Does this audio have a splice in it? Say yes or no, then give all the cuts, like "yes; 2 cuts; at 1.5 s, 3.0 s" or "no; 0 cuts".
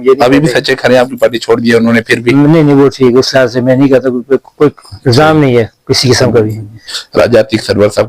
yes; 1 cut; at 6.9 s